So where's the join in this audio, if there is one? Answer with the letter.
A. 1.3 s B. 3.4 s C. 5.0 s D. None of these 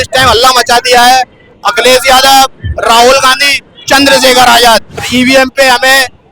C